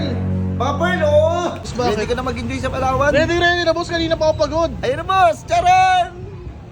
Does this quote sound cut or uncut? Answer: cut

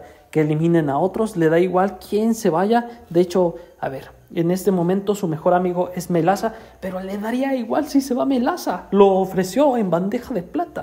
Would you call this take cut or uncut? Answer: uncut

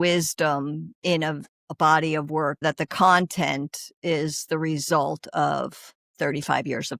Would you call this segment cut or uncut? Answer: cut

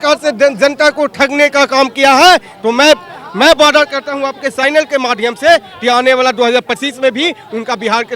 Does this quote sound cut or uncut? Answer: uncut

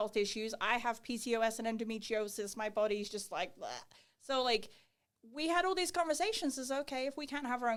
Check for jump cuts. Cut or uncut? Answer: uncut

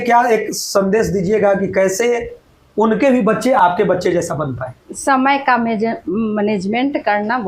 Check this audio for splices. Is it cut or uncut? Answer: cut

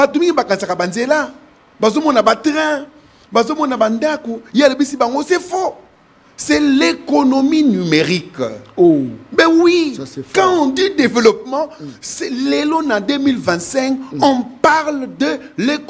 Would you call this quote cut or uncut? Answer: uncut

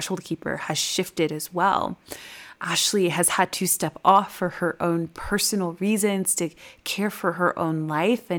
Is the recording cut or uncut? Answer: cut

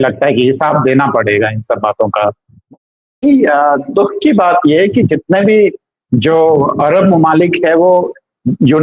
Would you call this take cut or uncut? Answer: cut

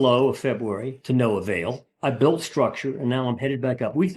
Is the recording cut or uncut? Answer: cut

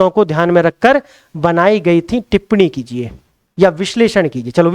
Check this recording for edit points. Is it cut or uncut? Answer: uncut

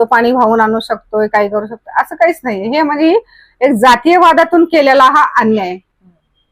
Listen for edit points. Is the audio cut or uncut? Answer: uncut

